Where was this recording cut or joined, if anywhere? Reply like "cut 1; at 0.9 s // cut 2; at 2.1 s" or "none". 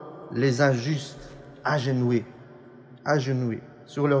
none

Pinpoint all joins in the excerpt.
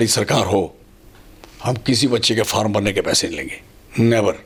none

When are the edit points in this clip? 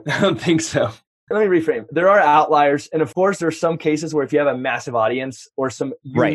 cut 1; at 1.3 s // cut 2; at 3.1 s

